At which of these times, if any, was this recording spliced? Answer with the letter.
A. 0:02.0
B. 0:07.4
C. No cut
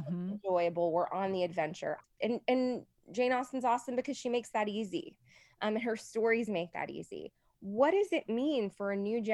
A